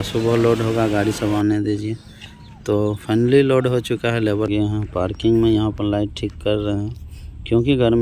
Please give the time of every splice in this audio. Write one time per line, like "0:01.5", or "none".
0:04.5